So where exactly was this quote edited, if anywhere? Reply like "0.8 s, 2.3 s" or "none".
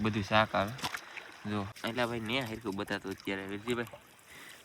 1.7 s